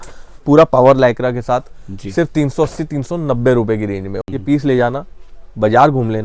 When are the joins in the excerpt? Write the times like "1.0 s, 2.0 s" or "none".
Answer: 4.2 s